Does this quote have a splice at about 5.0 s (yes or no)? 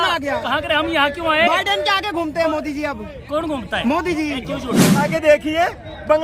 yes